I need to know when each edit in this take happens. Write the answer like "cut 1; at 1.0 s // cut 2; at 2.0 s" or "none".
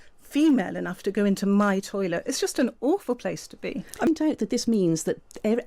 cut 1; at 4.1 s